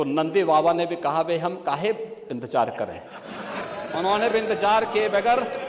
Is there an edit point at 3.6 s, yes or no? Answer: yes